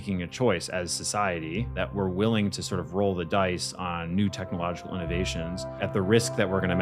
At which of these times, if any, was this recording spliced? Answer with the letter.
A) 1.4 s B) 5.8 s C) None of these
B